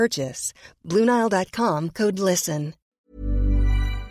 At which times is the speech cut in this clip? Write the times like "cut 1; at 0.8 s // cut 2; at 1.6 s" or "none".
cut 1; at 2.8 s

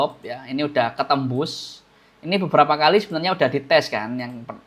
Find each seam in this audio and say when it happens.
none

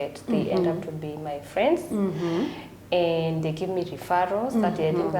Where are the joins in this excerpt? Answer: none

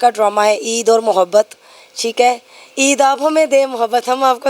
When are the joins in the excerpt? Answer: none

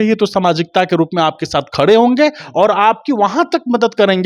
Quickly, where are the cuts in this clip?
none

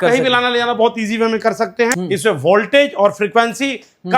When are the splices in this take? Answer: cut 1; at 1.9 s

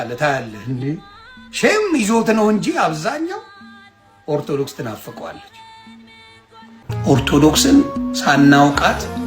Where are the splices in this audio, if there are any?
cut 1; at 6.8 s

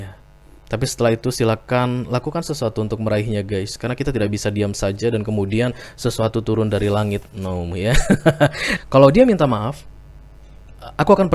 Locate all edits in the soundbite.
cut 1; at 8.7 s

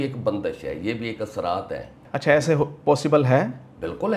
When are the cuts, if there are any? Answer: cut 1; at 2.0 s

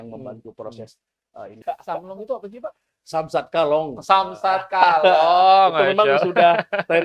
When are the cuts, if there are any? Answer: cut 1; at 1.6 s

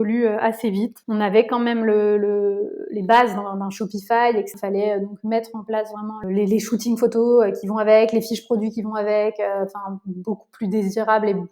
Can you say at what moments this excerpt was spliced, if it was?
cut 1; at 1.0 s // cut 2; at 4.5 s // cut 3; at 6.2 s

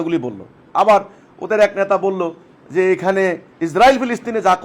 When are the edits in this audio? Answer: cut 1; at 3.5 s

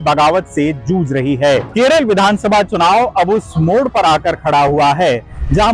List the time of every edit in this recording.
cut 1; at 1.7 s

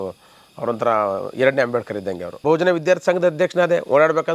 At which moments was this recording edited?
cut 1; at 2.4 s

